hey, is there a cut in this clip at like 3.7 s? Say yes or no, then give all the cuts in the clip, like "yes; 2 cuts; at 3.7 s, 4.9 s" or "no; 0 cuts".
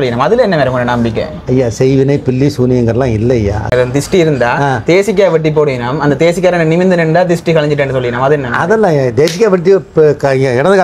yes; 1 cut; at 3.7 s